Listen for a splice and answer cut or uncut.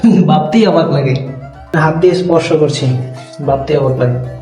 cut